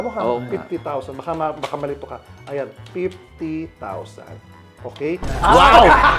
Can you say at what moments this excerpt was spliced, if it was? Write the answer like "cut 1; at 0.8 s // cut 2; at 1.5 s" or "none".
none

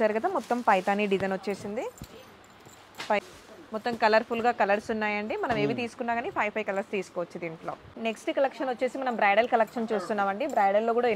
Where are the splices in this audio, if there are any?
cut 1; at 3.2 s // cut 2; at 7.9 s

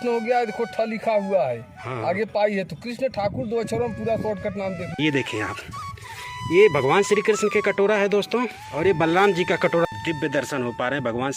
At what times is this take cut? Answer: cut 1; at 5.0 s // cut 2; at 9.9 s

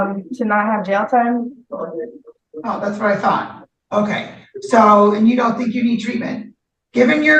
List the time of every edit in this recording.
none

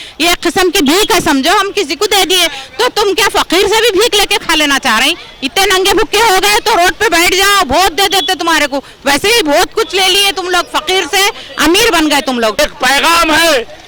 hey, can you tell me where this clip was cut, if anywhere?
cut 1; at 12.6 s

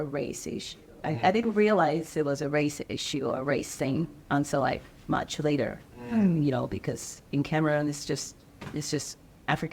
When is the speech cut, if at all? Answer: none

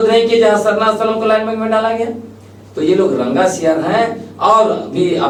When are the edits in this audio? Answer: none

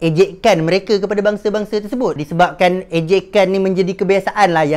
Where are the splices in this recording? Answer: cut 1; at 2.2 s

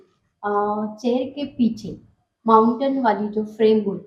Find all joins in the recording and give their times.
none

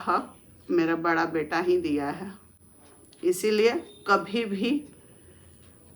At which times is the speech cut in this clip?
none

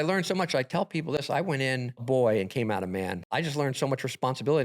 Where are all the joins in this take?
cut 1; at 2.0 s // cut 2; at 3.2 s

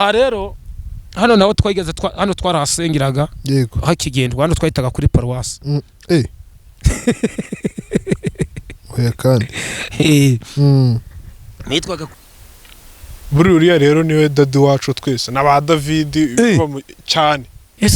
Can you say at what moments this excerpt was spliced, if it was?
cut 1; at 12.1 s

